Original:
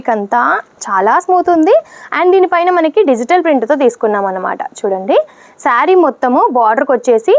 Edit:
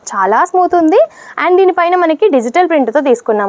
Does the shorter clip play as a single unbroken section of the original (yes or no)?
yes